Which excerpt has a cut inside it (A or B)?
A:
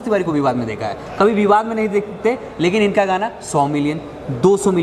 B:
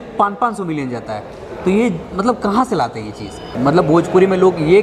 B